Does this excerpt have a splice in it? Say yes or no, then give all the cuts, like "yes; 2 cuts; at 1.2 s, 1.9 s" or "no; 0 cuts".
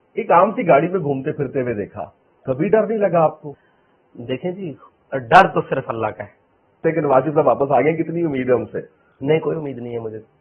yes; 2 cuts; at 3.5 s, 6.8 s